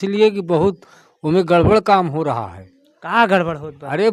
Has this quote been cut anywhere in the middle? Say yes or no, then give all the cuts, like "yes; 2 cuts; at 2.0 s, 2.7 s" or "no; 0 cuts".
no; 0 cuts